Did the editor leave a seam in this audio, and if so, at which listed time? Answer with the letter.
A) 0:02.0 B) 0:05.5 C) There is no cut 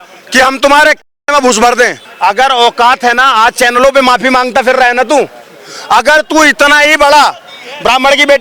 A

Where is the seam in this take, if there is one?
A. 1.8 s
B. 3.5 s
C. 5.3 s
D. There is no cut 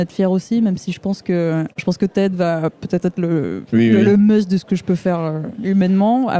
A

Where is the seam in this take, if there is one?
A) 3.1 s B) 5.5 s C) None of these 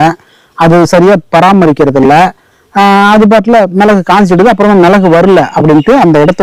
C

